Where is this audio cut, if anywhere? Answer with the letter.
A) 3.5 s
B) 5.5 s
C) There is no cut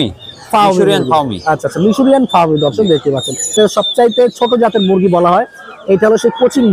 A